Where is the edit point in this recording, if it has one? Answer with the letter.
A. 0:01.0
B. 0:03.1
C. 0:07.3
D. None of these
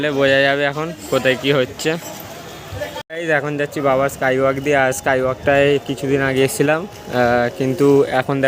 B